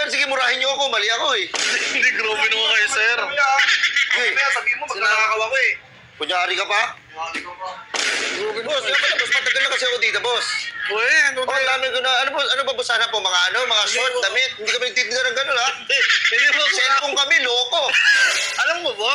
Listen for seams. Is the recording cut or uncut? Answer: uncut